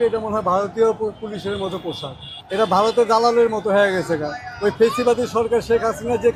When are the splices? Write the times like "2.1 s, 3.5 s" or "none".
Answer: none